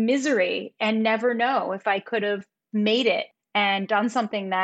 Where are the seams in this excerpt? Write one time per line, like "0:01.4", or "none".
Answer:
0:02.5
0:03.4